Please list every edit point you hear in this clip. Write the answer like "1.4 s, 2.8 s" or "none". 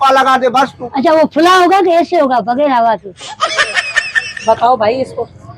none